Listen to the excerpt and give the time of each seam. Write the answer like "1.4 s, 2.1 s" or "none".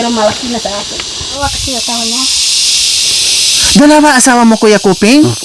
1.4 s